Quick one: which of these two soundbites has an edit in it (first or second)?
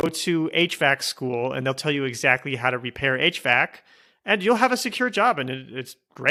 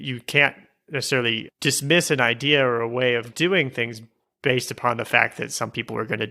second